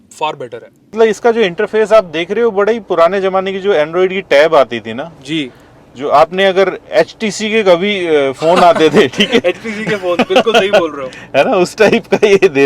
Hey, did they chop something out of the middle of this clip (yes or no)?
yes